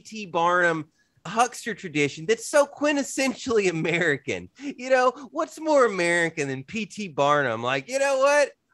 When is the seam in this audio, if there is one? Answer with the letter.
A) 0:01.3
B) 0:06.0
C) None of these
A